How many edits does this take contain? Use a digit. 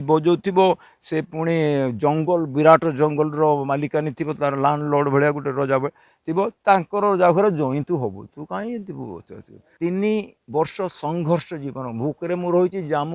1